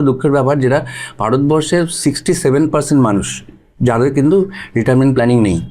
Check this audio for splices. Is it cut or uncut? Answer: uncut